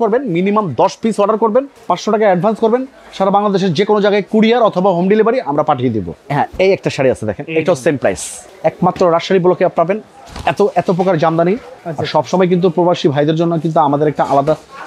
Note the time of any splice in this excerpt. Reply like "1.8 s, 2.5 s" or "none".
1.8 s, 6.1 s, 8.5 s, 11.7 s

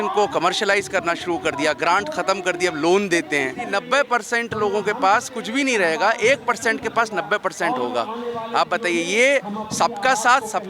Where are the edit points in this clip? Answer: 3.6 s

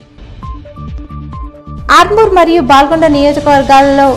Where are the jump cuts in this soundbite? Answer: 1.1 s

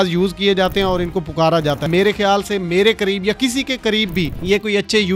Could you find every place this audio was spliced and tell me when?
1.9 s

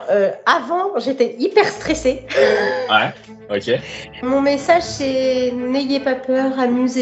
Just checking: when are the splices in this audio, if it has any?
4.3 s

